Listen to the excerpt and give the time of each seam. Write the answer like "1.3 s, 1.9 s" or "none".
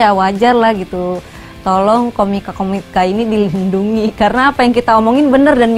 none